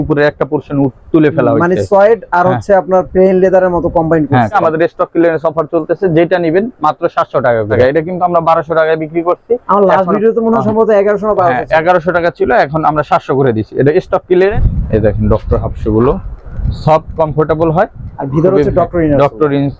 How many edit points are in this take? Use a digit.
3